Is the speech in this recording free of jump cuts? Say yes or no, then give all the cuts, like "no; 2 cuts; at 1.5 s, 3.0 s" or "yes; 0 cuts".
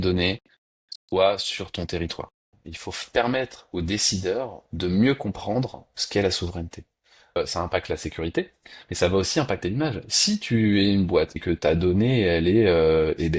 no; 3 cuts; at 2.4 s, 7.4 s, 11.4 s